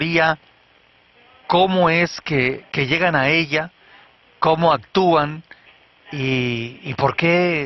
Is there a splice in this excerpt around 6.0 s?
yes; 1 cut; at 6.0 s

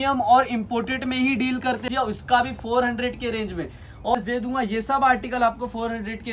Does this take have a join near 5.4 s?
no; 2 cuts; at 1.8 s, 4.1 s

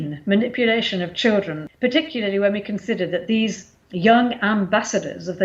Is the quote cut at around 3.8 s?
no; 1 cut; at 1.6 s

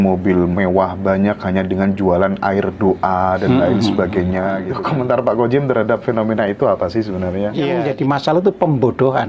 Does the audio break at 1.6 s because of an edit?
no; 2 cuts; at 4.7 s, 7.8 s

